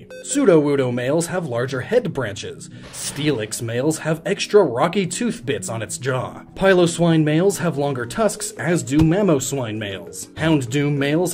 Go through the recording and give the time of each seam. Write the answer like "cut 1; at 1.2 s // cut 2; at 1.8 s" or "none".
cut 1; at 1.4 s